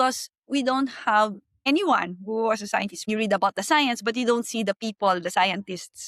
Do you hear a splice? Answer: yes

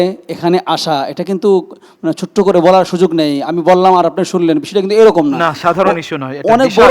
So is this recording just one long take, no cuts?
yes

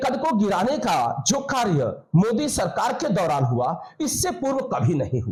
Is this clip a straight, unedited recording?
yes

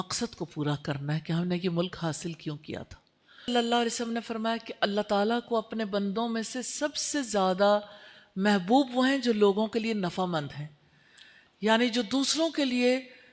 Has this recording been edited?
yes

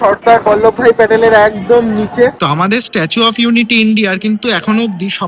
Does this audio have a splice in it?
yes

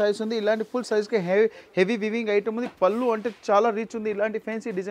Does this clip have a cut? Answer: no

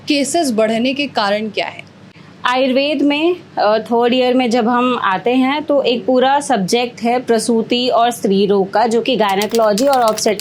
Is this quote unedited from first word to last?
yes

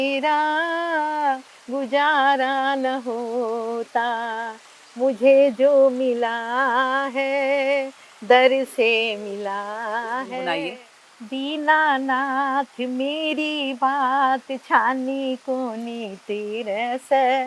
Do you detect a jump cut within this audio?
yes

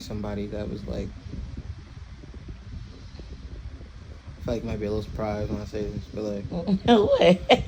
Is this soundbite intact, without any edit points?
yes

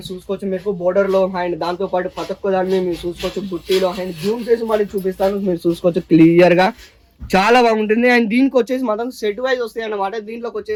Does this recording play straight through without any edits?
yes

